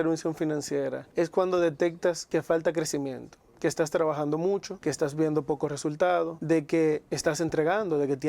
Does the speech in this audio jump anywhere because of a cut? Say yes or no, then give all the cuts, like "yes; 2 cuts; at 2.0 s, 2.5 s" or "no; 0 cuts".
yes; 4 cuts; at 1.0 s, 2.2 s, 4.7 s, 6.4 s